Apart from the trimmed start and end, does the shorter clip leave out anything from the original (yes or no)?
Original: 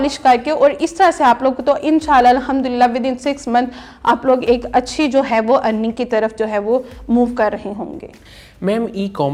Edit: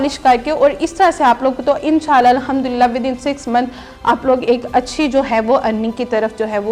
no